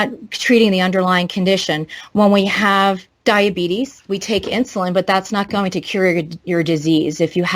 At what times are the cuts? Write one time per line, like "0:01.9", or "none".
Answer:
0:03.1